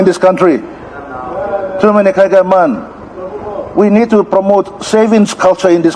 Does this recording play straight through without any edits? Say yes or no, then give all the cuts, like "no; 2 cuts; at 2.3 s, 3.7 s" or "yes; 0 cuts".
yes; 0 cuts